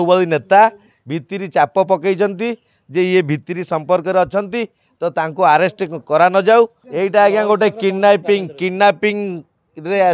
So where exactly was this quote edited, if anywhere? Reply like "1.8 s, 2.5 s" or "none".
6.8 s